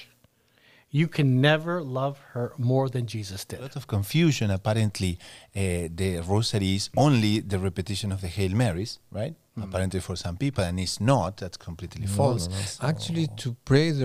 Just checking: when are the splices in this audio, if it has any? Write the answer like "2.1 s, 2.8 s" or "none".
3.8 s, 12.7 s